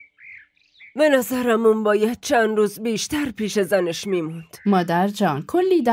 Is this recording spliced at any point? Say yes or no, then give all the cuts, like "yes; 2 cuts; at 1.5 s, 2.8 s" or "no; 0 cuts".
no; 0 cuts